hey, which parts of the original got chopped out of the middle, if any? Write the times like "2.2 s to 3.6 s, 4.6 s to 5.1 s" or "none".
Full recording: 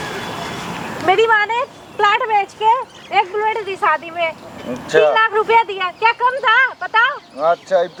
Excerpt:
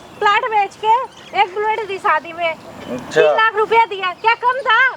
none